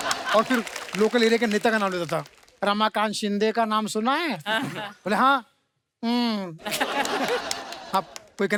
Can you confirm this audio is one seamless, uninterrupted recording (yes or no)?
yes